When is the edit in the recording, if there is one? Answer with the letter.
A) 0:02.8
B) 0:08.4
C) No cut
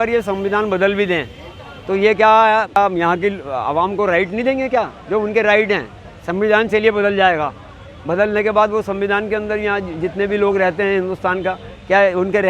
A